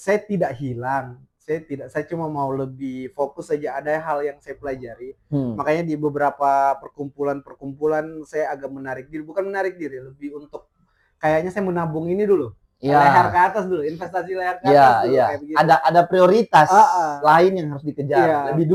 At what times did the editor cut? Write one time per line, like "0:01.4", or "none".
none